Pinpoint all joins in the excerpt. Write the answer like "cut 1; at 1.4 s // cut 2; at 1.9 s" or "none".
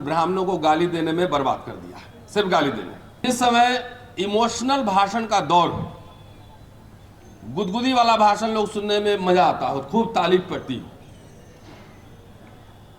cut 1; at 3.2 s